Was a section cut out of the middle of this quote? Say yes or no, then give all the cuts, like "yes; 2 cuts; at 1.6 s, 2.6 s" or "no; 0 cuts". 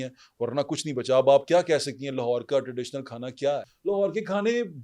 yes; 1 cut; at 3.7 s